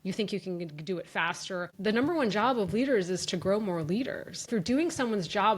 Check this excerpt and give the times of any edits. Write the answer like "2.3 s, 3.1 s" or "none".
1.7 s, 4.5 s